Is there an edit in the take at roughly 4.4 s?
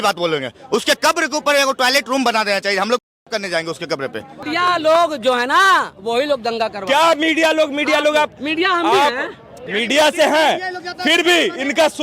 yes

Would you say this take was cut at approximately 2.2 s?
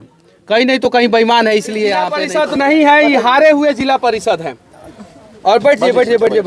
yes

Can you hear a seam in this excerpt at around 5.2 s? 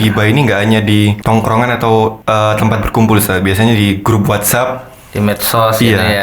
no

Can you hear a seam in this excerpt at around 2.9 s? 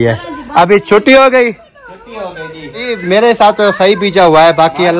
yes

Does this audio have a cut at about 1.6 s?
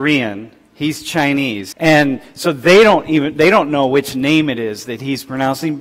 yes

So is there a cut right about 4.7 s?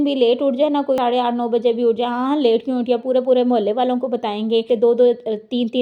yes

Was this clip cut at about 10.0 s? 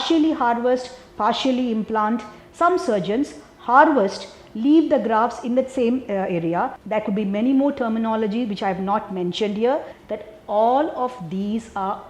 yes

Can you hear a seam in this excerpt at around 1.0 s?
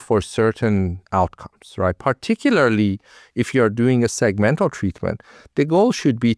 yes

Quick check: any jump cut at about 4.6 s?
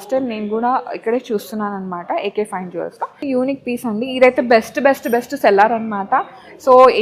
no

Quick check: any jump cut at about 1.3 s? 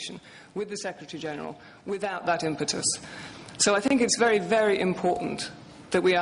no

